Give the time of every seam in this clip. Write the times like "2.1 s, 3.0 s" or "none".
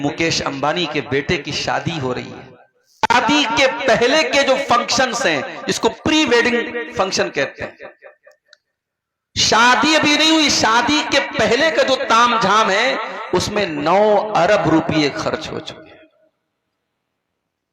2.9 s